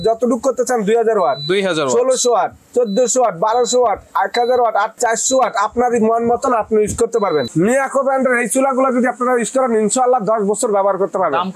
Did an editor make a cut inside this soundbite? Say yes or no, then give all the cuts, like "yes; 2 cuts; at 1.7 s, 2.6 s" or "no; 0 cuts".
yes; 2 cuts; at 4.9 s, 7.5 s